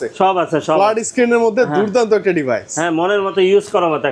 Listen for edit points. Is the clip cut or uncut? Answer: uncut